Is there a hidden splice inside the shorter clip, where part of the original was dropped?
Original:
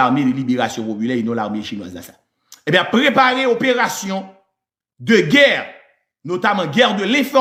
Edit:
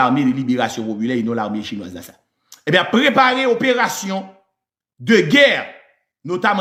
no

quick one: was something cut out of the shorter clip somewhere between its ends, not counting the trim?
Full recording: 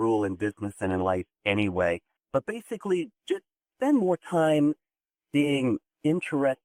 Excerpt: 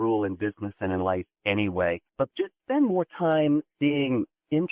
yes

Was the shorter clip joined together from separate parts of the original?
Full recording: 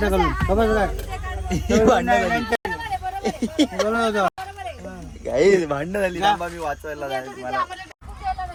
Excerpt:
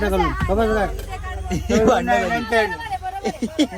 no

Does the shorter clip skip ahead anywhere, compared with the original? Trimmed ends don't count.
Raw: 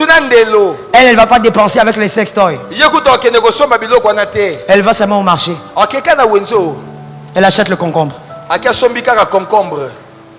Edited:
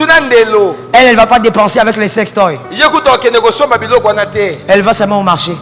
no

